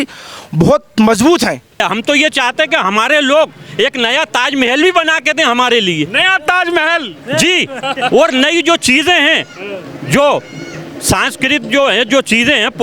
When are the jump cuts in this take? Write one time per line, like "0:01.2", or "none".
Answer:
0:01.8